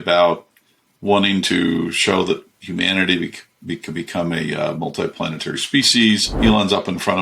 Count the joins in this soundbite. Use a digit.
1